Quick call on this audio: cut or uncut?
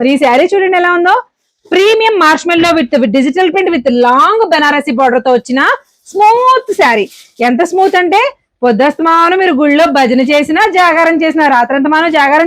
uncut